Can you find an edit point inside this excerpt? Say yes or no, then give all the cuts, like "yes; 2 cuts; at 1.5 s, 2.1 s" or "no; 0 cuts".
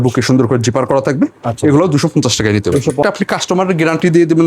yes; 1 cut; at 3.0 s